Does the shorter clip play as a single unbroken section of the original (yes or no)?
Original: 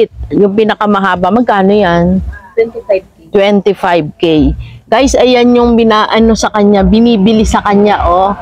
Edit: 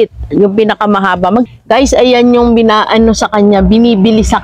no